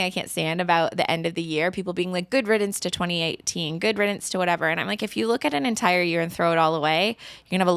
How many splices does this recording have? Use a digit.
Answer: 1